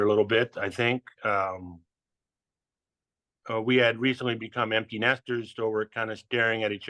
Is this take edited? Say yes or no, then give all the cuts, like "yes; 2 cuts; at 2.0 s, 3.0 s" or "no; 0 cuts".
no; 0 cuts